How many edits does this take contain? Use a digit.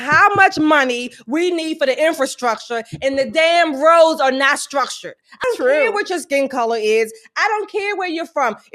1